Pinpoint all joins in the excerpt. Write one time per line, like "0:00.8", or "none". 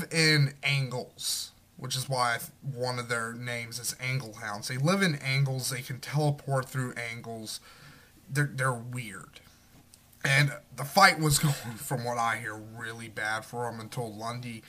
0:11.7